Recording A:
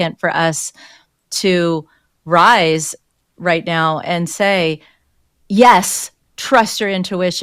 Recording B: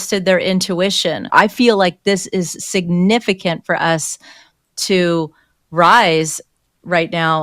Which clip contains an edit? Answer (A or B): B